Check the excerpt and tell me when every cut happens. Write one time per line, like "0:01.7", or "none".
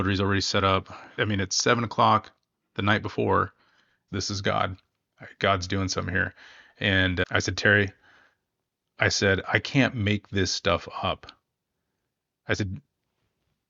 0:01.1
0:04.0